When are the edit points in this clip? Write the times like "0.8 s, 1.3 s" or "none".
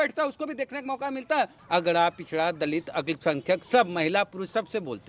1.5 s

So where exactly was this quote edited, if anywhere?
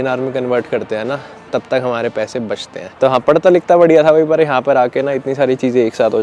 2.9 s

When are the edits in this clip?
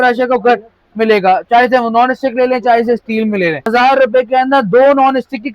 3.7 s

